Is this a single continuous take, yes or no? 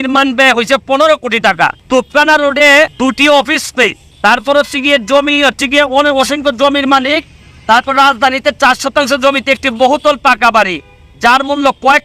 no